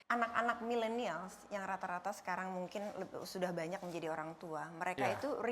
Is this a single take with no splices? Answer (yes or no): yes